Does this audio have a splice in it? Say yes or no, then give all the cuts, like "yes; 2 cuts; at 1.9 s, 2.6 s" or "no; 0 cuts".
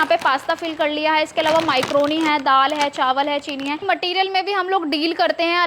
yes; 1 cut; at 3.8 s